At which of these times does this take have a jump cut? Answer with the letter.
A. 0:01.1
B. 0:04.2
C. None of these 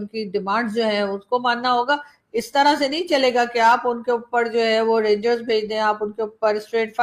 C